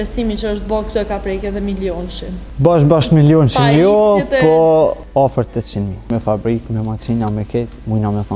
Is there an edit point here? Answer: yes; 3 cuts; at 2.4 s, 5.0 s, 6.1 s

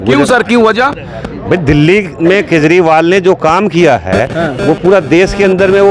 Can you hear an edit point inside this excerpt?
no; 0 cuts

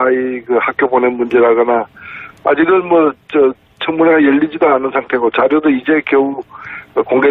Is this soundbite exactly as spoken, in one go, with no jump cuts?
no; 1 cut; at 4.5 s

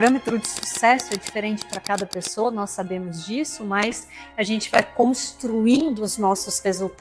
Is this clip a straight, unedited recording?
yes; 0 cuts

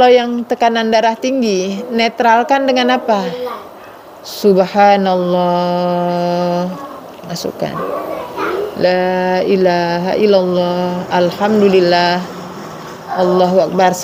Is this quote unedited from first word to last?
yes; 0 cuts

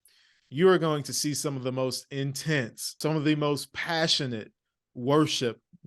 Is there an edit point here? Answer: yes; 1 cut; at 2.8 s

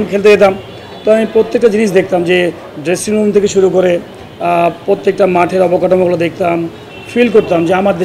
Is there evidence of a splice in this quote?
no; 0 cuts

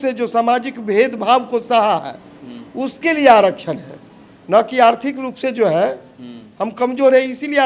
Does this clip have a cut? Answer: no; 0 cuts

